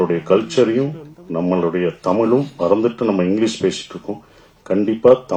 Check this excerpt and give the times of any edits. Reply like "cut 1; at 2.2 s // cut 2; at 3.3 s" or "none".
none